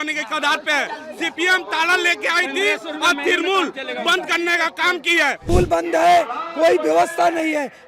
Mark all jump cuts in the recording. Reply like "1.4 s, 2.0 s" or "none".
5.4 s

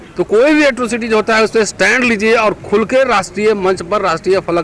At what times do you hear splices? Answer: none

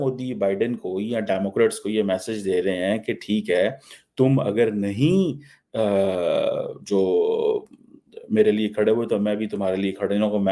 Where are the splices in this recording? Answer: none

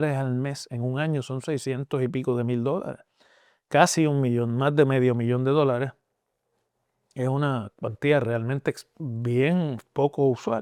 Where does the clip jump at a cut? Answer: none

